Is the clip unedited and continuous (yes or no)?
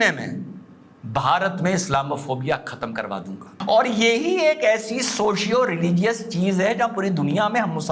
no